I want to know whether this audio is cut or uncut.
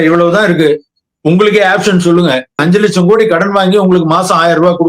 cut